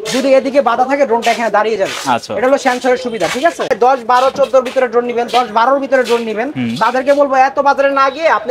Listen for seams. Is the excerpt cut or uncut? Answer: cut